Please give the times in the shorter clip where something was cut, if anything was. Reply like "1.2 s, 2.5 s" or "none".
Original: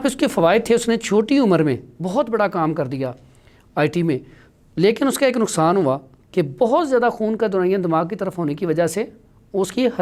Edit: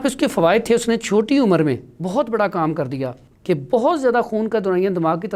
3.3 s